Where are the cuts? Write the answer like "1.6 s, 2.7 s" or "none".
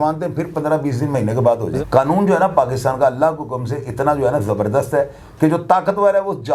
1.7 s